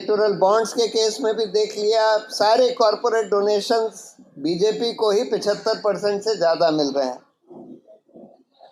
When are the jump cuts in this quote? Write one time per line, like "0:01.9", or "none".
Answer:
none